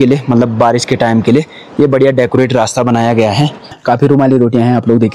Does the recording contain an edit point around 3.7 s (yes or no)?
yes